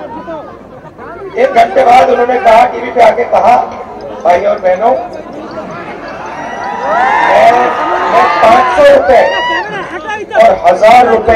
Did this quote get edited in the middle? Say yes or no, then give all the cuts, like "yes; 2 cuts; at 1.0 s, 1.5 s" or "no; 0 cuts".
no; 0 cuts